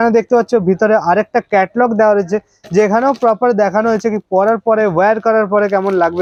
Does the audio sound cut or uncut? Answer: uncut